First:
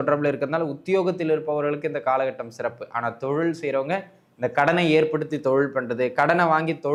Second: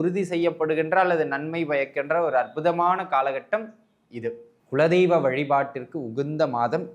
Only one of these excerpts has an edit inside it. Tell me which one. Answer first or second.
second